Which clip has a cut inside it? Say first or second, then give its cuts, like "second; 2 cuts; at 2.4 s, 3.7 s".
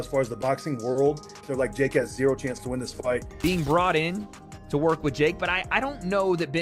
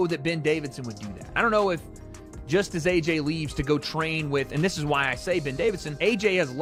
first; 1 cut; at 3.4 s